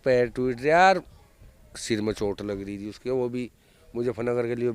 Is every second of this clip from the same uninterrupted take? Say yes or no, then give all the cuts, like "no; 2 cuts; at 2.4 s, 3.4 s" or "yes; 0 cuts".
yes; 0 cuts